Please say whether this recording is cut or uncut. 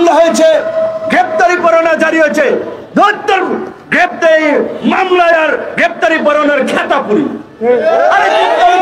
uncut